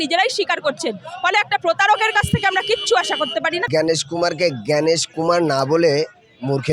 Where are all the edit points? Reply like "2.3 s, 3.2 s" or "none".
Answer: 3.6 s